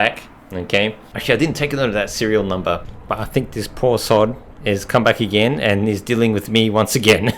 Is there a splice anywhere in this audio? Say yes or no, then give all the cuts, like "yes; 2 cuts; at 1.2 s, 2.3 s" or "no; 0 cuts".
yes; 1 cut; at 1.1 s